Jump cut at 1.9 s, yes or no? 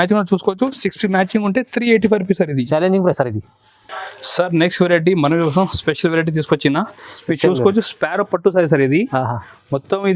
no